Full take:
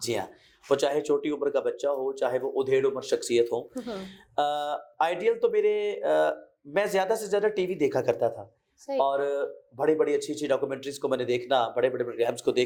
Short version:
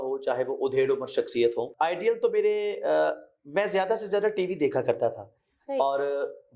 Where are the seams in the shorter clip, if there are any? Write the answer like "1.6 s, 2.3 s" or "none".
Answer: 1.7 s